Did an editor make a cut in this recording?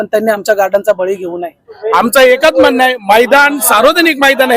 yes; 1 cut; at 1.7 s

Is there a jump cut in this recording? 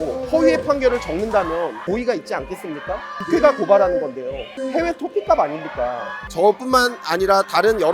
yes; 3 cuts; at 1.8 s, 3.1 s, 6.2 s

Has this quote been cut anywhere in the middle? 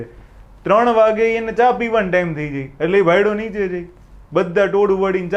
no; 0 cuts

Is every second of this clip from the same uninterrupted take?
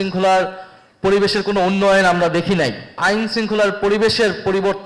no; 1 cut; at 3.0 s

